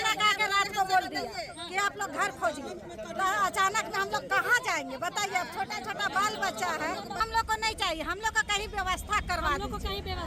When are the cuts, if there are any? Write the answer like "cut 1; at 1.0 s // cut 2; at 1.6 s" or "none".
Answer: cut 1; at 7.2 s